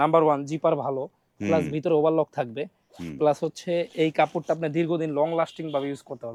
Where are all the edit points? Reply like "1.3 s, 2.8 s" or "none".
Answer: none